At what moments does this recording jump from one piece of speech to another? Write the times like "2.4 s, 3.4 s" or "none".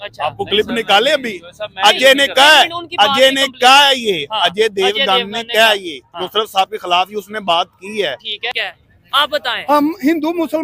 8.6 s